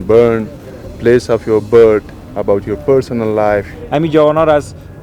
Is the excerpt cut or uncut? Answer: cut